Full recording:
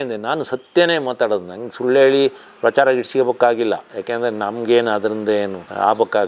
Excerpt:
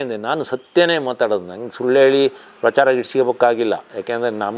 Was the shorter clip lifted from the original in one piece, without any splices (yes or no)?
yes